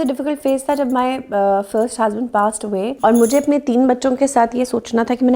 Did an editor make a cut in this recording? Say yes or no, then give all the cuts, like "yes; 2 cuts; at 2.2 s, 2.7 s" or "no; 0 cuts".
yes; 1 cut; at 3.0 s